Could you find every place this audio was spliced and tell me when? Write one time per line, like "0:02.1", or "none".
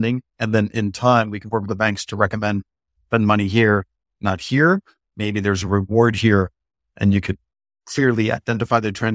none